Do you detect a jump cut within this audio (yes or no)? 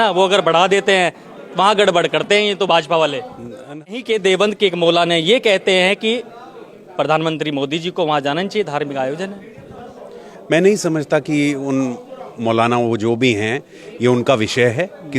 yes